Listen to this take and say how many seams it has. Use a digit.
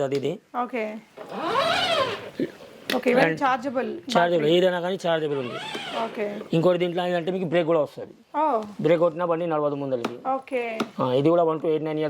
0